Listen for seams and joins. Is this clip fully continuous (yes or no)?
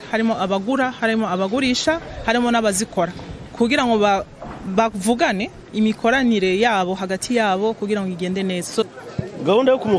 no